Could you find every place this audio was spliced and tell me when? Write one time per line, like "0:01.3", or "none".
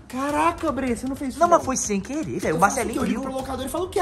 none